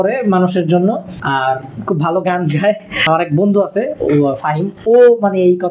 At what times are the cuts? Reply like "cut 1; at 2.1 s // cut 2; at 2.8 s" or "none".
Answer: cut 1; at 1.1 s // cut 2; at 2.9 s